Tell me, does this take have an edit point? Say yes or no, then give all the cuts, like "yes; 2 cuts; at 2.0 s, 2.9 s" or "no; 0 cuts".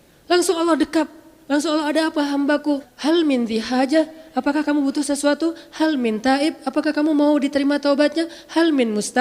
yes; 1 cut; at 2.9 s